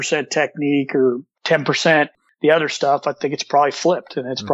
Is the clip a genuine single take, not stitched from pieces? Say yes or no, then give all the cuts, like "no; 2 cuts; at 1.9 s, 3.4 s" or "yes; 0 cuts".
yes; 0 cuts